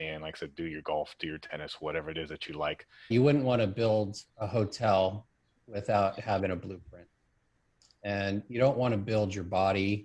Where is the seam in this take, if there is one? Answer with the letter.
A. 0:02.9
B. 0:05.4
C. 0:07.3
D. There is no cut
A